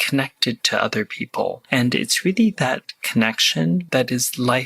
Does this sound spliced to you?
yes; 2 cuts; at 1.6 s, 3.9 s

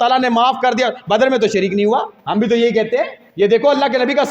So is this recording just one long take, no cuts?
no; 2 cuts; at 2.2 s, 3.2 s

